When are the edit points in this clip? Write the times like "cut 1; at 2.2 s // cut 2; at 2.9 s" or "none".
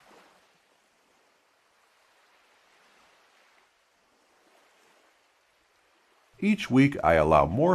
cut 1; at 6.3 s